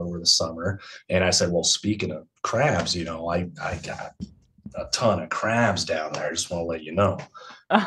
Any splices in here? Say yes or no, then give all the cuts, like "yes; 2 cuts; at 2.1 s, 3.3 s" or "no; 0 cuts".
no; 0 cuts